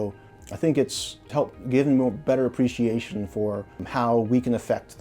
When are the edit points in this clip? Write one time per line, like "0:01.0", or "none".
0:03.8